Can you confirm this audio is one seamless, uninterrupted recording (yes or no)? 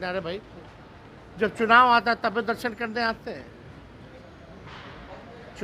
yes